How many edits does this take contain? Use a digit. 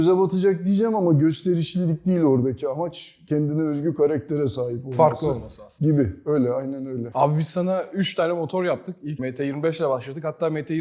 0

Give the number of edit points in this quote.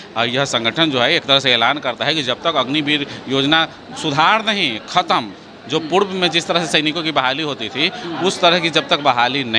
0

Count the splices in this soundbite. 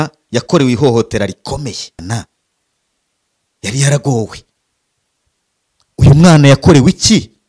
1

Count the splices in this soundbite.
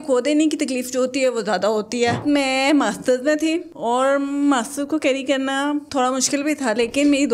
1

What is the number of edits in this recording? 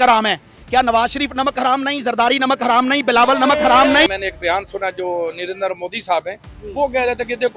1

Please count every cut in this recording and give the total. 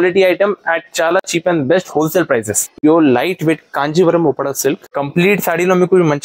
2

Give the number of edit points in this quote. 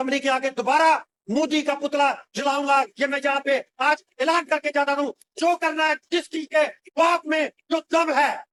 0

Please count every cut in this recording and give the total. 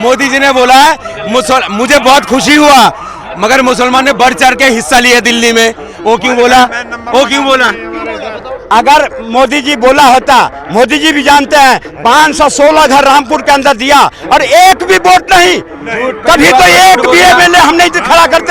0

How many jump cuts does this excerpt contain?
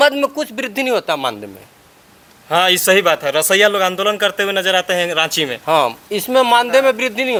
0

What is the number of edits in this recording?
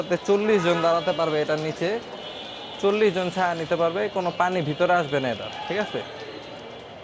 0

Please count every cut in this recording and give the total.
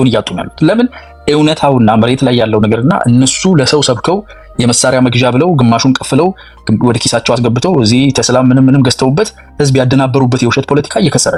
0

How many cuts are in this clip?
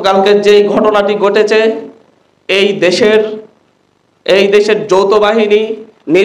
0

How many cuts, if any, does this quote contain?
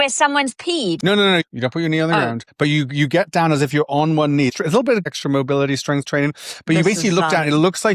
3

